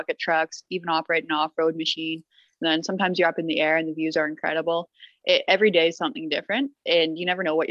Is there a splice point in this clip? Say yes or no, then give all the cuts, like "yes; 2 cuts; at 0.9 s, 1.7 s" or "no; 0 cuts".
no; 0 cuts